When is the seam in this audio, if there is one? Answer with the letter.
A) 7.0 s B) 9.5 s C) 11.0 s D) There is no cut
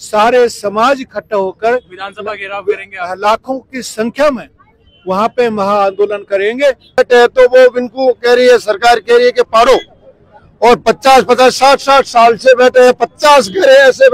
A